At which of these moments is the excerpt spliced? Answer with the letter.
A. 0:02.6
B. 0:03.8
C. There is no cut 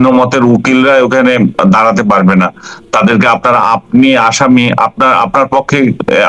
C